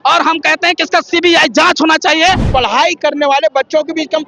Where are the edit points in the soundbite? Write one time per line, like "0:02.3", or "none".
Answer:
0:02.5

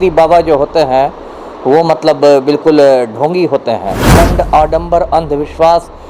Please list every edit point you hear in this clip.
0:04.1

